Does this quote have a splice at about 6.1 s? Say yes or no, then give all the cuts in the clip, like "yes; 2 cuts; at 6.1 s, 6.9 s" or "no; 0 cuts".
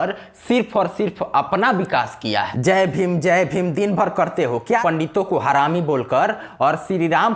no; 2 cuts; at 2.5 s, 4.8 s